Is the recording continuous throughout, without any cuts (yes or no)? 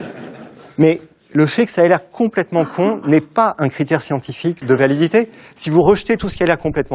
no